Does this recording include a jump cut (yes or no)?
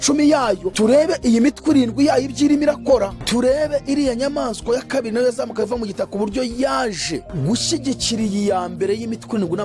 no